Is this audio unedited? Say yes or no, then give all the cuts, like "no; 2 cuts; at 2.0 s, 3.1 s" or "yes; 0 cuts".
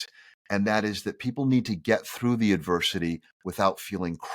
yes; 0 cuts